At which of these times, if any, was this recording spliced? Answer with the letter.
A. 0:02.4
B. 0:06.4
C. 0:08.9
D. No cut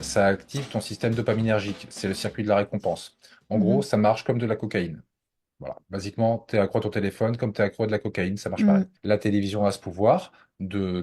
C